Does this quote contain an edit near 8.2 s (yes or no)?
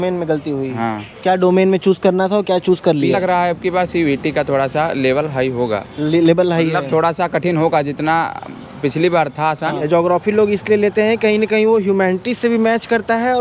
no